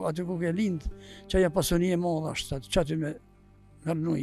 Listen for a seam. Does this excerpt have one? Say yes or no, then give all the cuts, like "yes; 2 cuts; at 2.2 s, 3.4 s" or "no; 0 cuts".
no; 0 cuts